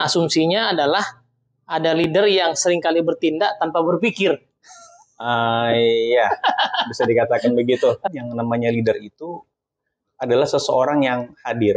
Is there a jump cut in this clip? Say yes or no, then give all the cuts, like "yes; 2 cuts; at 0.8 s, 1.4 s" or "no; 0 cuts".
yes; 1 cut; at 8.0 s